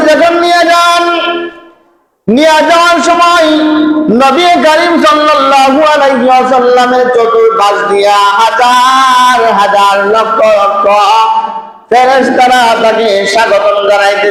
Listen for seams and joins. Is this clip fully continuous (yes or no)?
yes